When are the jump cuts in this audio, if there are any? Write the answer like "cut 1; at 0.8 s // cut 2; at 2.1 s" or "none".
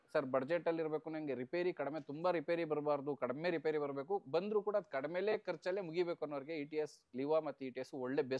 none